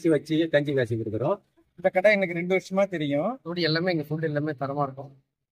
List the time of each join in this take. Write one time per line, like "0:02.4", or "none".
0:01.5
0:03.5